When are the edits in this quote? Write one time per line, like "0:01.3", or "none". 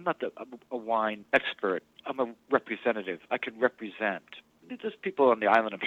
0:01.2
0:04.7